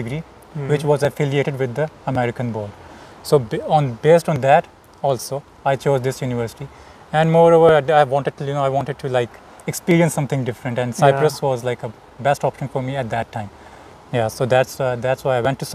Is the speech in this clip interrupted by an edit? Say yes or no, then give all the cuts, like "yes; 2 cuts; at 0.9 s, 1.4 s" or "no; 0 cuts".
no; 0 cuts